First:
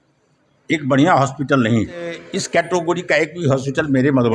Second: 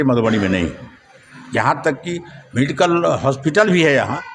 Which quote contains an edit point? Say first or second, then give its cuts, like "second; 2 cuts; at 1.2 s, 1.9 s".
first; 1 cut; at 2.3 s